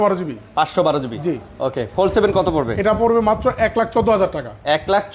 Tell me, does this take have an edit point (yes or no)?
no